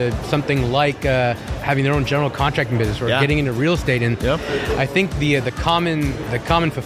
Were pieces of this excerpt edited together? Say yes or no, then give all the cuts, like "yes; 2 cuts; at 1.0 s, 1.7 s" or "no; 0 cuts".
yes; 1 cut; at 1.5 s